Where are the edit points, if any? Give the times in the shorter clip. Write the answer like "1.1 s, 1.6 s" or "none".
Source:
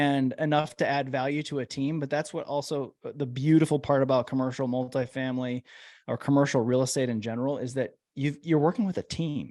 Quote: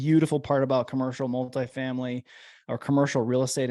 none